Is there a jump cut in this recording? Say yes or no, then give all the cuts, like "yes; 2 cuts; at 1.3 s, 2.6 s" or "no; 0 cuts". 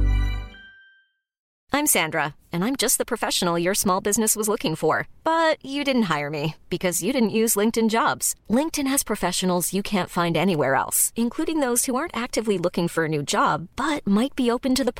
yes; 1 cut; at 1.5 s